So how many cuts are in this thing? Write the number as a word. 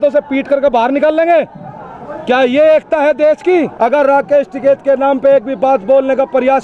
one